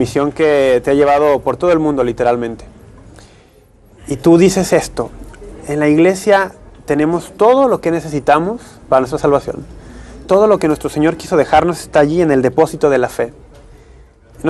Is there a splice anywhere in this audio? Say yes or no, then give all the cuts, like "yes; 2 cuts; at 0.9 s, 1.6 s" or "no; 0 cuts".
no; 0 cuts